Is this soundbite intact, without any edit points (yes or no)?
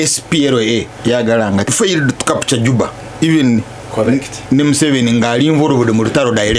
no